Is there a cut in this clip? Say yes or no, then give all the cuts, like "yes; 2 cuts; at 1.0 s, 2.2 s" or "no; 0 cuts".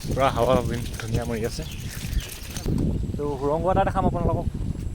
yes; 1 cut; at 2.6 s